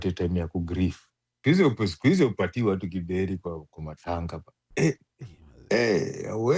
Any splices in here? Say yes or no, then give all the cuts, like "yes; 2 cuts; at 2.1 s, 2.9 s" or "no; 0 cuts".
yes; 1 cut; at 1.4 s